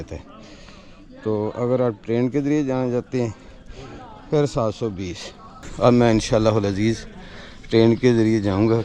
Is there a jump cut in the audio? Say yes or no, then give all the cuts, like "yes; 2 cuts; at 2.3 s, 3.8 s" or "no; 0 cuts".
no; 0 cuts